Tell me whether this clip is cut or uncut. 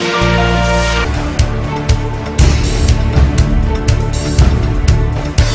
uncut